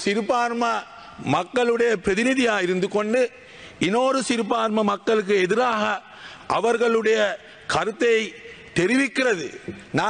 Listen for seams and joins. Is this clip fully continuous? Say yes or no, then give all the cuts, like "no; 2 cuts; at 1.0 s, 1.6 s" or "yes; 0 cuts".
yes; 0 cuts